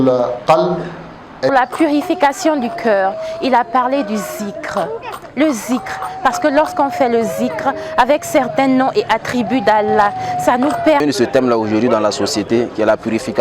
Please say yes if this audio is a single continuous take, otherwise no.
no